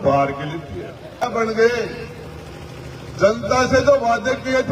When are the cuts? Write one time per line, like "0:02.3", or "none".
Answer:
0:01.3